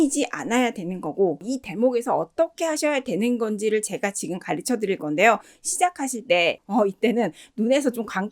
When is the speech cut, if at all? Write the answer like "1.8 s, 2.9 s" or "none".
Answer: 1.4 s, 6.6 s